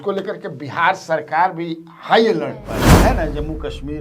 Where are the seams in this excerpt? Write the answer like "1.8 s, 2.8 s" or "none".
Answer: 2.9 s